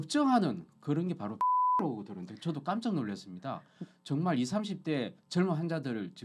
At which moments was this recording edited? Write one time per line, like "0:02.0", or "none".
none